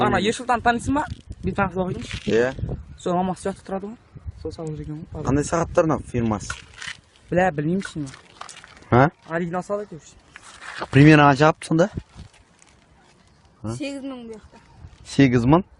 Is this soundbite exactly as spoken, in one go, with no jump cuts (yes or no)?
no